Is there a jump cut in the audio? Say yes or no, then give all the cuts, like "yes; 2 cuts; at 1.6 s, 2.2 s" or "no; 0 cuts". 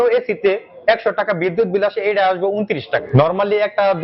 yes; 1 cut; at 3.0 s